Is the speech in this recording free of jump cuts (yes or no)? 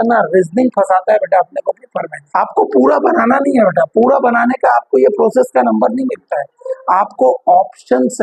no